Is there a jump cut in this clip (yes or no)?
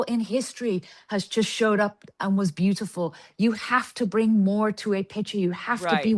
no